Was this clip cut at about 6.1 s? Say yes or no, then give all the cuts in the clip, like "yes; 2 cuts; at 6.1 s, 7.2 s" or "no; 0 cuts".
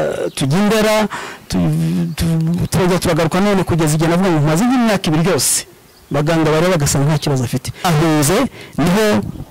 no; 1 cut; at 7.8 s